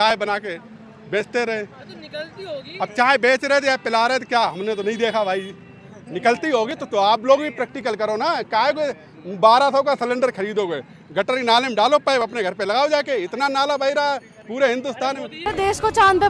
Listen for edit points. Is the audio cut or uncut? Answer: cut